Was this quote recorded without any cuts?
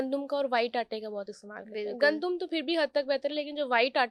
yes; 0 cuts

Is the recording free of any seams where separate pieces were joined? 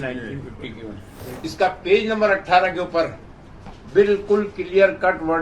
no; 1 cut; at 1.2 s

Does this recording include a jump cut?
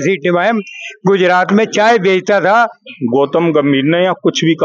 yes; 1 cut; at 2.9 s

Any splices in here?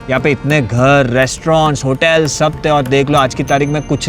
no; 0 cuts

